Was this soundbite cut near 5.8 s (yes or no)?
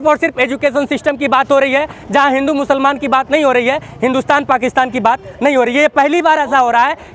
no